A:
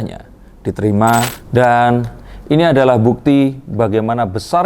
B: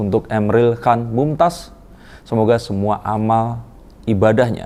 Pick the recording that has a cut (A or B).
A